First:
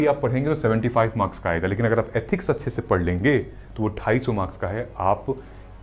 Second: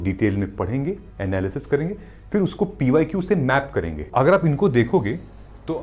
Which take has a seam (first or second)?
second